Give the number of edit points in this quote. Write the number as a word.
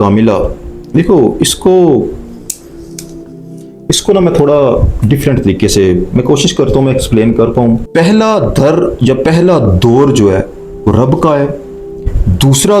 one